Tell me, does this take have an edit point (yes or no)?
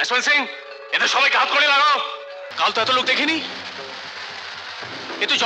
yes